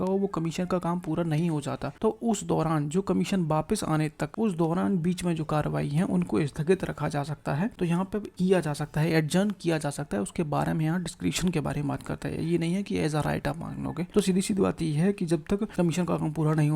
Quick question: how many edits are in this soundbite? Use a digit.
5